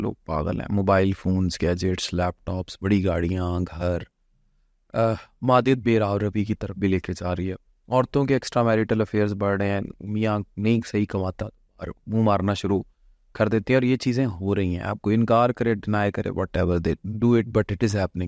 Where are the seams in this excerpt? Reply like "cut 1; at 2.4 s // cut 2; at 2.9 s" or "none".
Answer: none

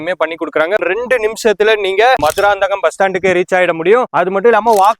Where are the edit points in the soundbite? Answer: cut 1; at 0.8 s // cut 2; at 2.2 s

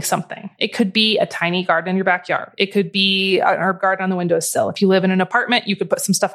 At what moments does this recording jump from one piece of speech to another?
none

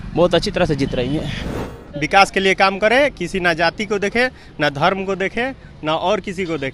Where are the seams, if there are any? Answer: cut 1; at 1.6 s

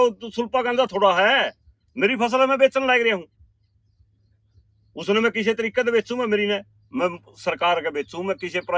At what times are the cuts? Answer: none

